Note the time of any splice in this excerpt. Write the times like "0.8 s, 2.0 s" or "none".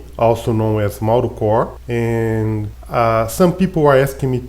1.8 s, 2.7 s